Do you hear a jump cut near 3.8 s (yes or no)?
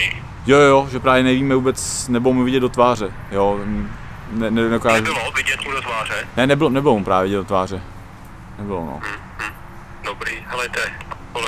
no